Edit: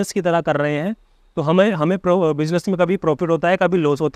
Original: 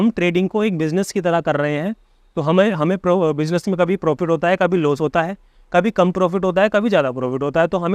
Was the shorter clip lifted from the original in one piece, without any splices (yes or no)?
yes